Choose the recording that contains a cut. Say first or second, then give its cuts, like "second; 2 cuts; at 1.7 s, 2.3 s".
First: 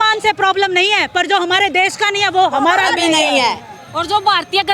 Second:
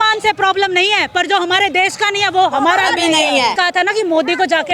second; 1 cut; at 3.6 s